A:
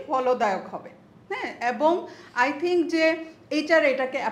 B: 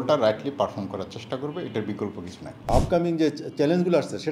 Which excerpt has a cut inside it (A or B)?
B